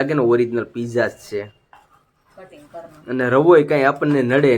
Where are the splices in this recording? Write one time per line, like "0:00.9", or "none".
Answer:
none